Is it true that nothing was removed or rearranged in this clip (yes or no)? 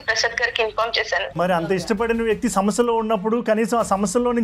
no